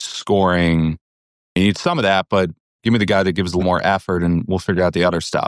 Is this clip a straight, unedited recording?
no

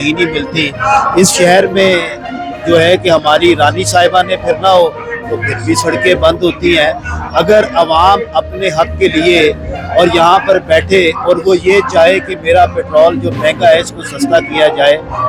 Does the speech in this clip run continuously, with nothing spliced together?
yes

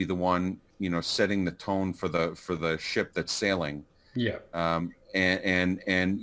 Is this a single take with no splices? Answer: yes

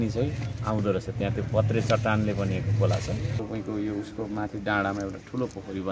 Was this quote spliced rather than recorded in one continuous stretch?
yes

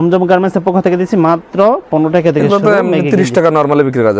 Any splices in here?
no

